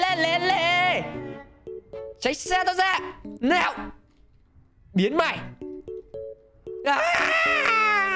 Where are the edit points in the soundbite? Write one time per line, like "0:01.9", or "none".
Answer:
none